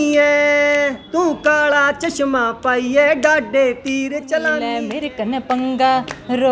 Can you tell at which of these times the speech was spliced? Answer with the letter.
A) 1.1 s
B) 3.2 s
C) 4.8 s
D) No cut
C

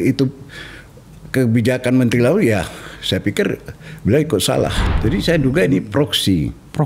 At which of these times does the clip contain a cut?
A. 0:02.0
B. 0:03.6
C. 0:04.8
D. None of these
C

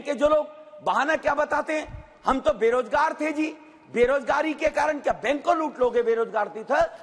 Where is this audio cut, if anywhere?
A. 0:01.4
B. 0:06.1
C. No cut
C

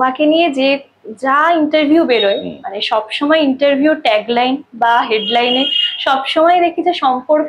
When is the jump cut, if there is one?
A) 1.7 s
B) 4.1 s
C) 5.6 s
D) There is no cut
D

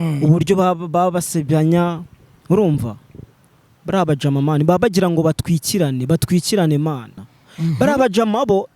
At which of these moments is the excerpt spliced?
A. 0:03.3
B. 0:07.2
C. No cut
B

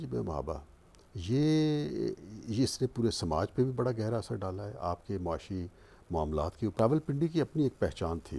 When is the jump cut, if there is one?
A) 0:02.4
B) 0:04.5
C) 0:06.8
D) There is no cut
C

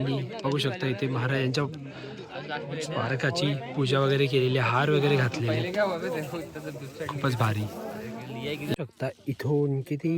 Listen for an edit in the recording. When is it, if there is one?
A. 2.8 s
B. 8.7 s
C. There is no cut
B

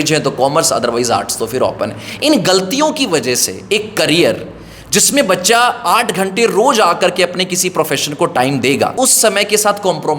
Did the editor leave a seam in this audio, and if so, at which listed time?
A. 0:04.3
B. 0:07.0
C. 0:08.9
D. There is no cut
C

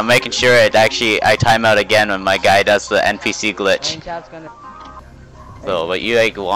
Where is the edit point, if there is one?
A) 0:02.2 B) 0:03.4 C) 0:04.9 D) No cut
C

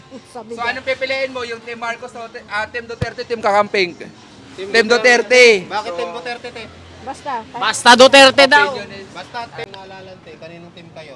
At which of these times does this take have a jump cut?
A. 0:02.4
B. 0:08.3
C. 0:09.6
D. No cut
C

